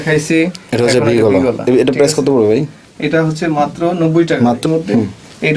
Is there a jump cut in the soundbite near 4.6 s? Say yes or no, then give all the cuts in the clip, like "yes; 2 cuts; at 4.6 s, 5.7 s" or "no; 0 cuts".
yes; 1 cut; at 4.6 s